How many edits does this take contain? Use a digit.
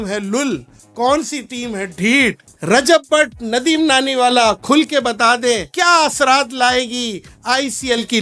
2